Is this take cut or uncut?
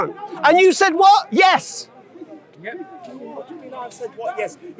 uncut